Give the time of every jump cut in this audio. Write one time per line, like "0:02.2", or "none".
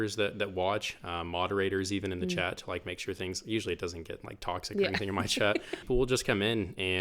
0:05.9